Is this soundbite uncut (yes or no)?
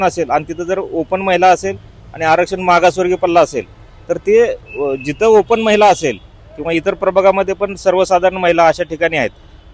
yes